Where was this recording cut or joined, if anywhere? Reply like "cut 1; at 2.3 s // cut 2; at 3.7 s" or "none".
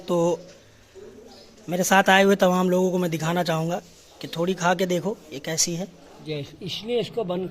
cut 1; at 6.2 s